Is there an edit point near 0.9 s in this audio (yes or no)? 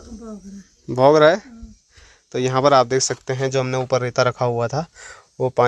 no